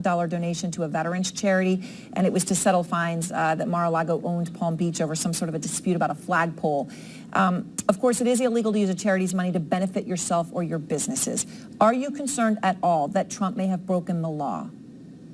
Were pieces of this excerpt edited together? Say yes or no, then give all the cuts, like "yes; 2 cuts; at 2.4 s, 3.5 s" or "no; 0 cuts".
no; 0 cuts